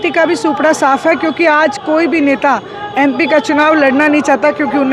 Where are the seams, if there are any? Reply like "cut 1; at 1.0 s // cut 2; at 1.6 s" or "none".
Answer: none